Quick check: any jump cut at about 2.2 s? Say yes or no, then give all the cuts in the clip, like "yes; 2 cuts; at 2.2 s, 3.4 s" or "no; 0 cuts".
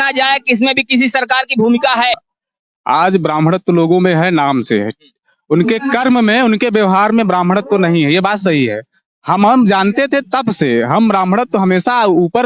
yes; 1 cut; at 2.2 s